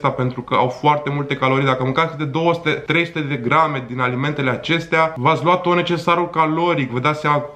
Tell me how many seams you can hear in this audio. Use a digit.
2